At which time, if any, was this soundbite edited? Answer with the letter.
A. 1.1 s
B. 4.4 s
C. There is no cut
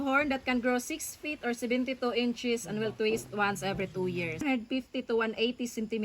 B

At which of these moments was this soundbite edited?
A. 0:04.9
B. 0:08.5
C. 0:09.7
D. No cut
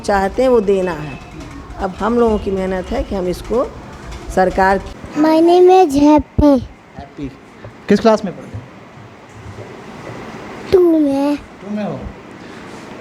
A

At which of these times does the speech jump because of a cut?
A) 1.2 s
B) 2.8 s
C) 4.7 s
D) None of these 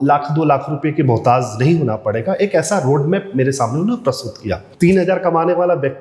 C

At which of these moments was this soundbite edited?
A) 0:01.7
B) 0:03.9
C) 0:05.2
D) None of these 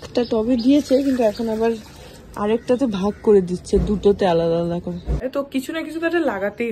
C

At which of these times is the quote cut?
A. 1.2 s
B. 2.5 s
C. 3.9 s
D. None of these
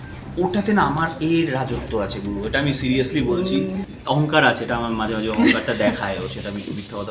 C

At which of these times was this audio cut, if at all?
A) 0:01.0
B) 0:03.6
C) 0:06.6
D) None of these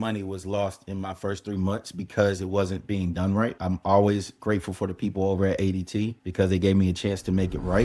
B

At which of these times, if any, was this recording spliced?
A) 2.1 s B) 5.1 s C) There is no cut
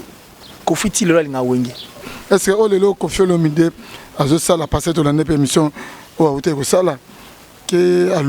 A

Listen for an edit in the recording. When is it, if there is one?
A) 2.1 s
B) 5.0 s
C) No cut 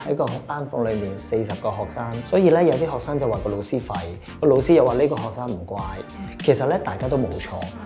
A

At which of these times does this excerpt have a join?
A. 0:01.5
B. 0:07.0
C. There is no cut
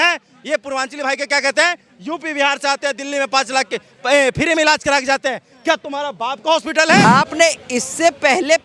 B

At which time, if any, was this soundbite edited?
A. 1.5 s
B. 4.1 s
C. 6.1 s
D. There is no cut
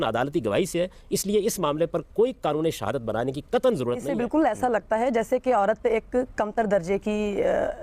B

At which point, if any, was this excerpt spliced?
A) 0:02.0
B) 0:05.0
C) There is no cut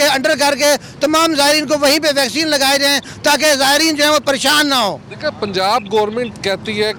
C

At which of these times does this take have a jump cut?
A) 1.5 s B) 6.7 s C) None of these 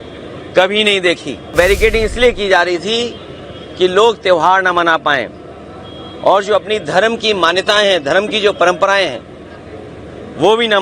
A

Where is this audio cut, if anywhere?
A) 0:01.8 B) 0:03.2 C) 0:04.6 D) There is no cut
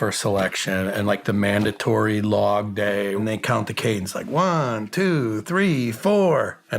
B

